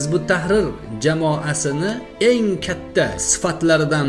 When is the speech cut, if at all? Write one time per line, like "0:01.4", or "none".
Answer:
0:02.1
0:03.1